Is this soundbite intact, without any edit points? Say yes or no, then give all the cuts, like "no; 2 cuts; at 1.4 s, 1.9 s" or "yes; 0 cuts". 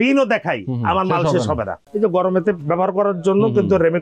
no; 1 cut; at 1.9 s